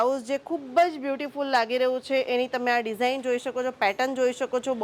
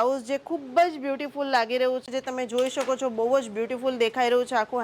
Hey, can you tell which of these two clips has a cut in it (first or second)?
second